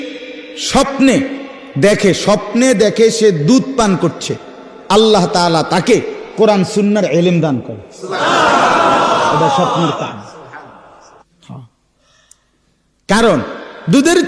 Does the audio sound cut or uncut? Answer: cut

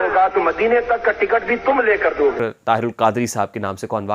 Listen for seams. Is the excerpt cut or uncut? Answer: cut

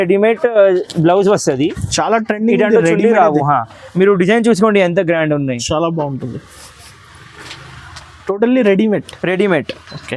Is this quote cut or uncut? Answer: uncut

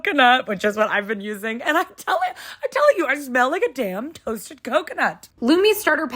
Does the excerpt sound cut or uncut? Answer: cut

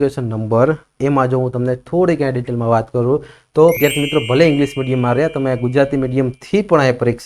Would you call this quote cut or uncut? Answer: cut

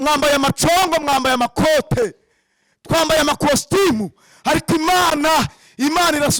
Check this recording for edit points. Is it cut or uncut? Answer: uncut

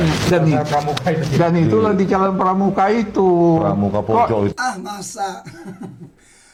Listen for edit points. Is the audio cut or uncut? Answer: uncut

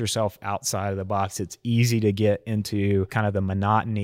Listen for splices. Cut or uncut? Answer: cut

